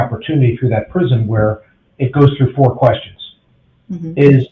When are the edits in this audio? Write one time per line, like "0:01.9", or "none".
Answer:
none